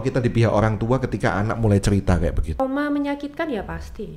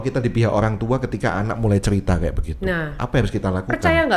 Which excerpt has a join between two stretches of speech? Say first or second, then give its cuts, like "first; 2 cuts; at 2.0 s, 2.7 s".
first; 1 cut; at 2.6 s